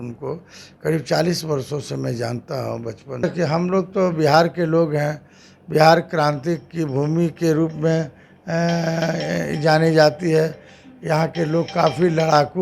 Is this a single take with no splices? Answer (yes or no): no